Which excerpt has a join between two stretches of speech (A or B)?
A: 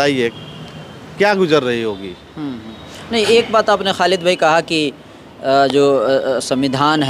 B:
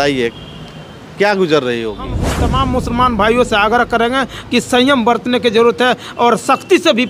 B